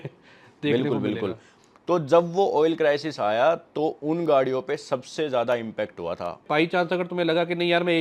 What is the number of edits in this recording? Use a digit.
2